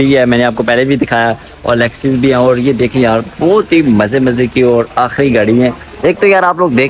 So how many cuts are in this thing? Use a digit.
0